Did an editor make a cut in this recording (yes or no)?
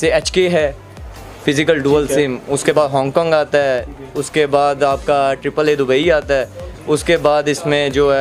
no